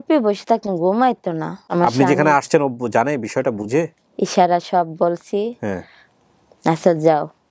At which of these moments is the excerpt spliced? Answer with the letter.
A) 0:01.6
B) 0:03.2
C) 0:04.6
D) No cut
A